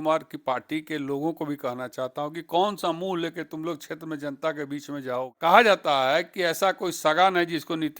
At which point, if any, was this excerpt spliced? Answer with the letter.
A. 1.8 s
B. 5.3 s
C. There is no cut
B